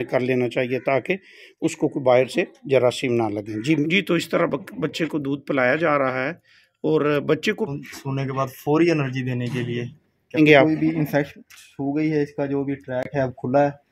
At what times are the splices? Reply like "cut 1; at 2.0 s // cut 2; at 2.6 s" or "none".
cut 1; at 3.8 s // cut 2; at 7.7 s // cut 3; at 10.4 s